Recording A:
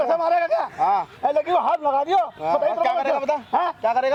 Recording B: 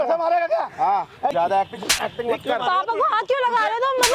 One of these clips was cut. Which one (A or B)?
B